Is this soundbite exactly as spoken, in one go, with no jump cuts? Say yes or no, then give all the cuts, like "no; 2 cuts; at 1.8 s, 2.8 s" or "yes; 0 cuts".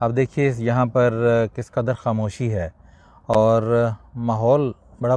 yes; 0 cuts